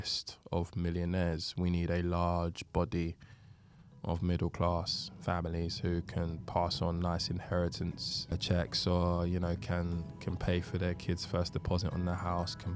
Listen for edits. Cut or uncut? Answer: cut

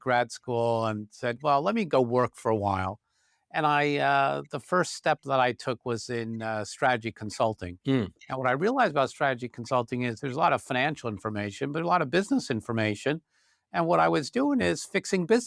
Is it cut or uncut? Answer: uncut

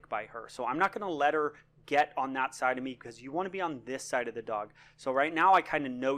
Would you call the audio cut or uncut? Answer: cut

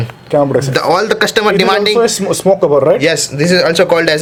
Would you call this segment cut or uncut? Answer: uncut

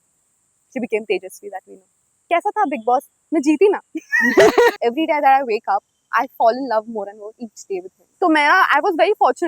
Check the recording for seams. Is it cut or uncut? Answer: cut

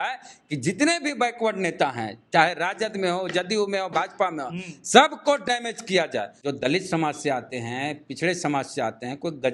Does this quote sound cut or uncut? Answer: cut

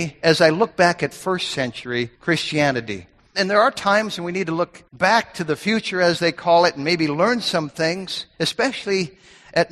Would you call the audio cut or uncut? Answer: cut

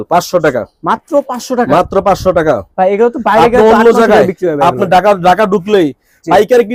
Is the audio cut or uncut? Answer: uncut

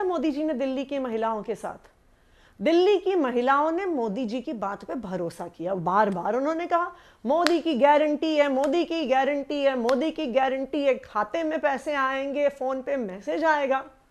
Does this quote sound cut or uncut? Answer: uncut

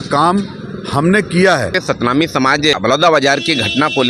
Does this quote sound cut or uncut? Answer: cut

